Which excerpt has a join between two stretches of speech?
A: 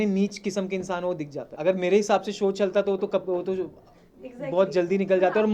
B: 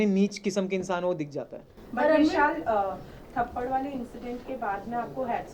A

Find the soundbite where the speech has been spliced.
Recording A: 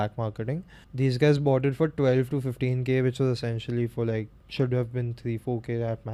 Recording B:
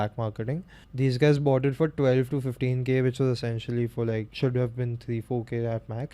B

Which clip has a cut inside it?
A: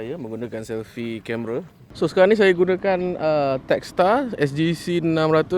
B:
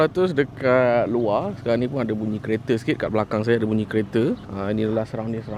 A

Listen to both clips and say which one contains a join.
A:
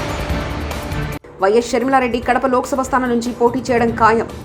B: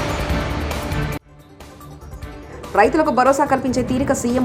A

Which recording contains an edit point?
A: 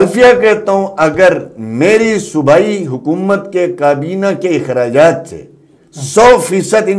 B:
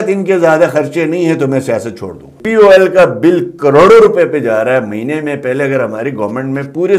B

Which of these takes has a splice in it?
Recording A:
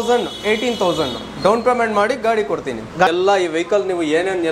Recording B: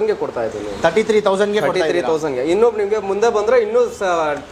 A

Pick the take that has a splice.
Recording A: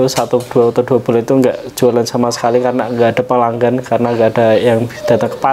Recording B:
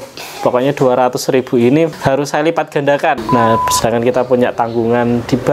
B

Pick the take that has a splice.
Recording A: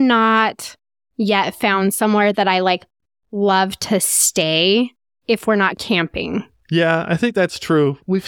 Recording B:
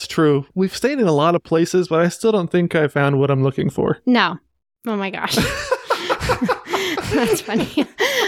A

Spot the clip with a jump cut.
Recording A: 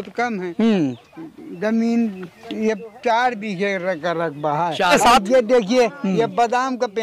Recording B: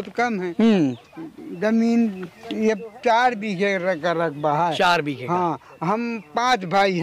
A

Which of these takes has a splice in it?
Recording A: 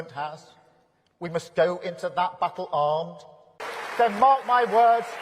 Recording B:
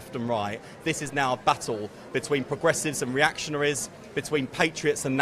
A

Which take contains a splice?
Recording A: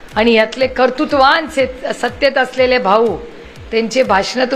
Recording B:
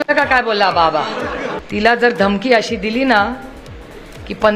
B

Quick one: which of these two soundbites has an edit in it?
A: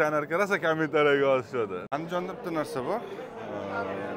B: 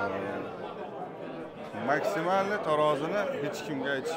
A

